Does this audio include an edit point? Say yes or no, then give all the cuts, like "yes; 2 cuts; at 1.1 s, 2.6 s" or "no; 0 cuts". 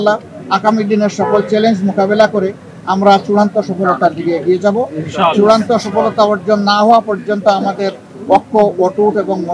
no; 0 cuts